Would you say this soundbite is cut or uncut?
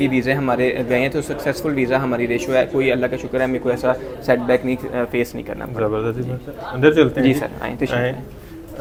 uncut